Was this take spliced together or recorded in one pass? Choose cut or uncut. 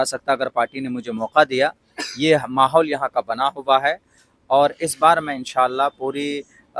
uncut